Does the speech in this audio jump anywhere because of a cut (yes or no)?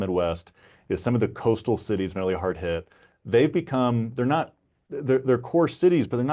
no